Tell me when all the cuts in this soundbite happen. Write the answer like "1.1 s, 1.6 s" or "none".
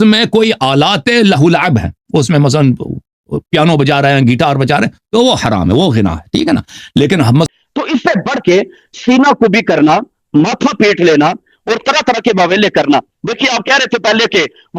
7.5 s